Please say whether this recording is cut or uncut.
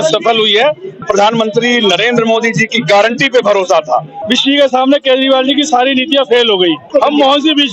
cut